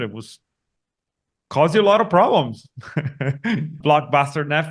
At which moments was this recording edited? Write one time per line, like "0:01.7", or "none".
0:03.8